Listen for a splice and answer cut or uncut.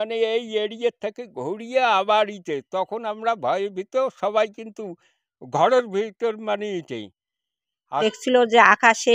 cut